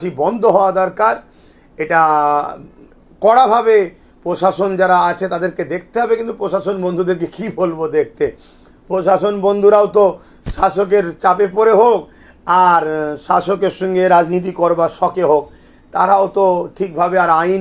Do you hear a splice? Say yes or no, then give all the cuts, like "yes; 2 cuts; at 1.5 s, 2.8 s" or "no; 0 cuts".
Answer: no; 0 cuts